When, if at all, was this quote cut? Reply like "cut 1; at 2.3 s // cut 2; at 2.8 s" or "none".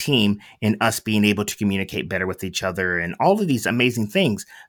none